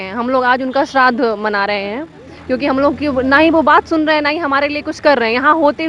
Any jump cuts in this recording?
no; 0 cuts

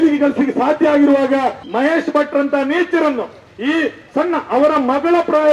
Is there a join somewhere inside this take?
yes; 1 cut; at 1.6 s

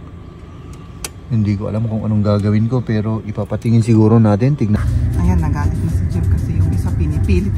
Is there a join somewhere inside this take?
yes; 1 cut; at 4.8 s

